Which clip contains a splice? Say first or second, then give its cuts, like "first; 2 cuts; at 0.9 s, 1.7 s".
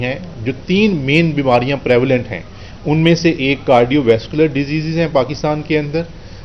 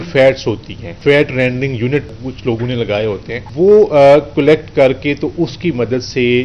second; 3 cuts; at 0.9 s, 2.2 s, 3.4 s